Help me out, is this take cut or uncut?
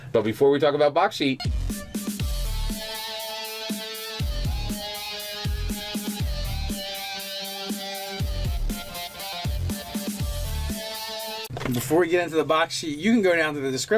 uncut